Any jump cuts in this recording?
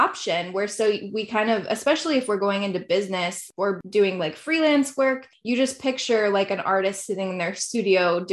yes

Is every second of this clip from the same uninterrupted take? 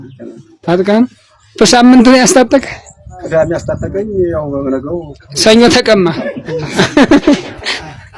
yes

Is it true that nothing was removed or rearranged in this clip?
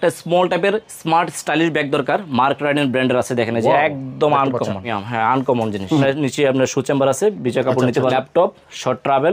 no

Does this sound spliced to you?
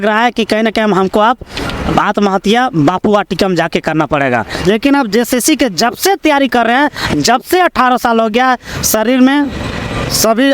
yes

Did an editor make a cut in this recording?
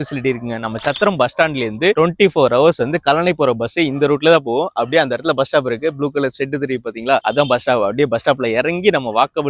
no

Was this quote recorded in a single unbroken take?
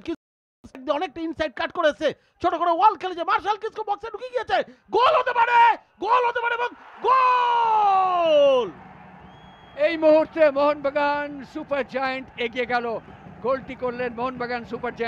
yes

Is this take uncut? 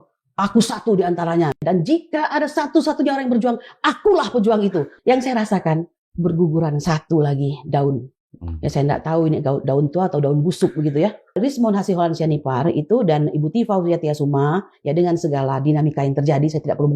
no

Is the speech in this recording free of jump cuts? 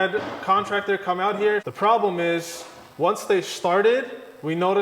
no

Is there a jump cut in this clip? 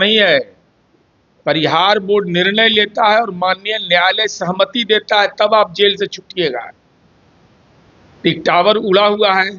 no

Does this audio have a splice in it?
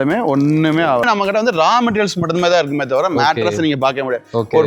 yes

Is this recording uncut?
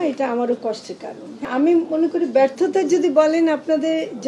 no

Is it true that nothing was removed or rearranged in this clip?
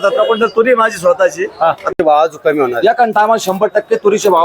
no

